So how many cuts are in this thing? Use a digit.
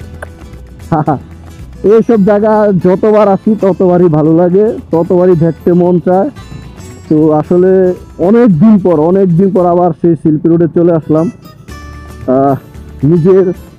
0